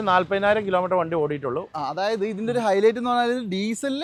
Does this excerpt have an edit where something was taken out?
no; 0 cuts

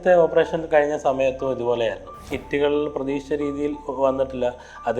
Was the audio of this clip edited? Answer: yes; 1 cut; at 2.4 s

